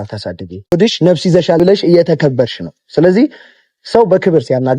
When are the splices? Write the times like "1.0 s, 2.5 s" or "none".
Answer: 0.7 s, 1.6 s